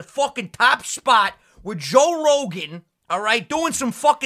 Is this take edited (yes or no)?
no